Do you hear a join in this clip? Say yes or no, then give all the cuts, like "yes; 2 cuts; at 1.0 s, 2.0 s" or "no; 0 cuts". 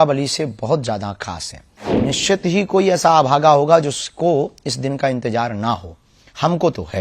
yes; 1 cut; at 1.9 s